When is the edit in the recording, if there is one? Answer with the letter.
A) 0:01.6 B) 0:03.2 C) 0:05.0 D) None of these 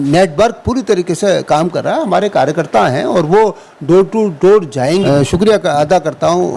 C